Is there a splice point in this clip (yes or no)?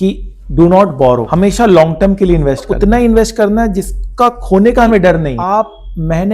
yes